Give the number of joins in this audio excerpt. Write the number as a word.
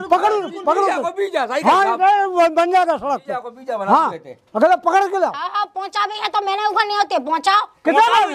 zero